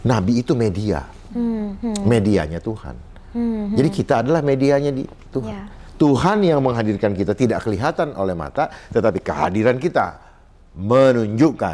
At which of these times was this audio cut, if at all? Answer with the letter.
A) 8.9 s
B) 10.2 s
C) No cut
C